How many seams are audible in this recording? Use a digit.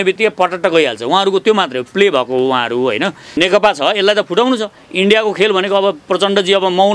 1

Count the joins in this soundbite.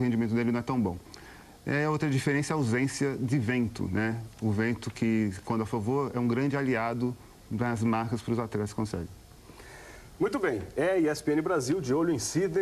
1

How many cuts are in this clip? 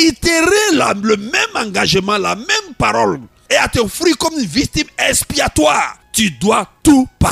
2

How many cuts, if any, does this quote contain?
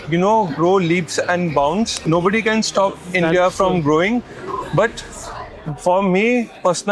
1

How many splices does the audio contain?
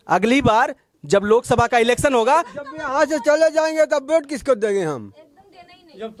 0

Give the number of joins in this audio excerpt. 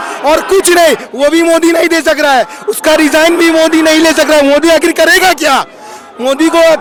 0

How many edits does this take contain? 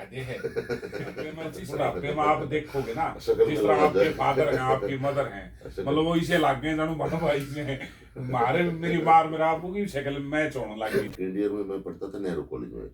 2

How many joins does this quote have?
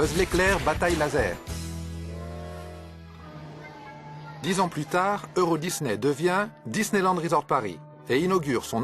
1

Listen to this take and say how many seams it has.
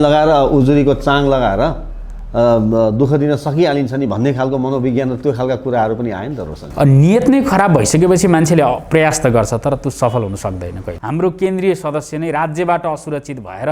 1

